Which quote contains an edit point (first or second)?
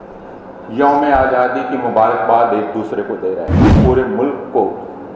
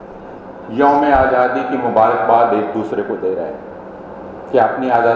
first